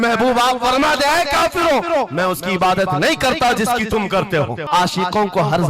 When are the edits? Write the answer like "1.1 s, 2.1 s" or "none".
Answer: 4.6 s